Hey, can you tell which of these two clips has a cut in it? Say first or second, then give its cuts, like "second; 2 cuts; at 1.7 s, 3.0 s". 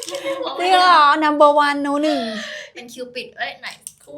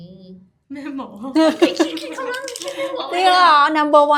first; 1 cut; at 2.6 s